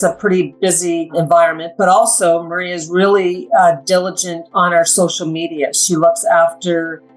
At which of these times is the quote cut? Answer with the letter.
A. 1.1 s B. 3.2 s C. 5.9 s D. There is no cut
A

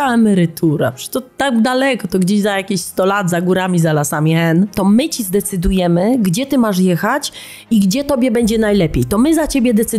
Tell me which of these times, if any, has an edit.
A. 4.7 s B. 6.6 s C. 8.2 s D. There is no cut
A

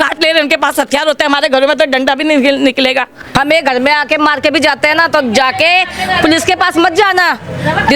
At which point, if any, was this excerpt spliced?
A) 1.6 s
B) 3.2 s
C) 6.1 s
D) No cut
B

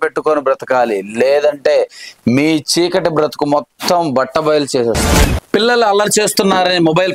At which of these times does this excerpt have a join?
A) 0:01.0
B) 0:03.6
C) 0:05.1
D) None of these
C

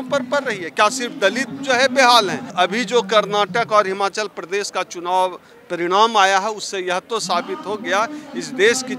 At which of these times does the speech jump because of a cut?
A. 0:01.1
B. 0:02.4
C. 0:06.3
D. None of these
B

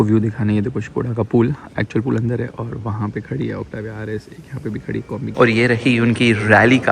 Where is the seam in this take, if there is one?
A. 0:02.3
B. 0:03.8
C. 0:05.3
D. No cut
C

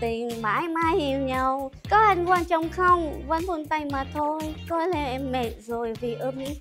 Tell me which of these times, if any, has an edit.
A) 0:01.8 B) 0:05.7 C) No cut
A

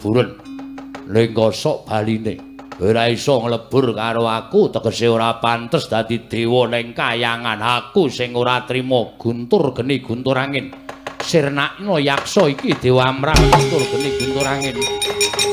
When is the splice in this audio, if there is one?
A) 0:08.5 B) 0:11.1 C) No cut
C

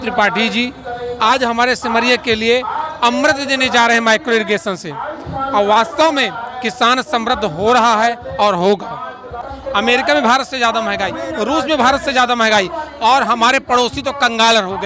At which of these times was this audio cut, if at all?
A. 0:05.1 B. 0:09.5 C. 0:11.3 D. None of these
B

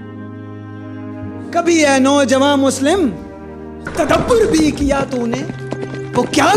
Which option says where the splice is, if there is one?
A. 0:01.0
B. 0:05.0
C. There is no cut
A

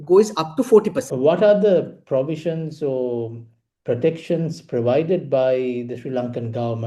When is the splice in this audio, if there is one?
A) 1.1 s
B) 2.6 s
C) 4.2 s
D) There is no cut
A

